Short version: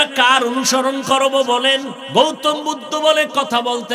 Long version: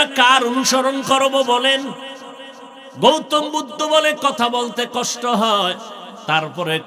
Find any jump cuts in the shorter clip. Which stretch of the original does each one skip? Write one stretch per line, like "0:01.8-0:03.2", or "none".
0:02.0-0:02.9